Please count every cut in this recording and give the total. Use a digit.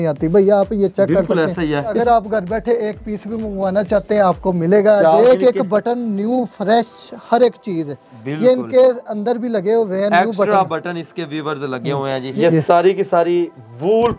3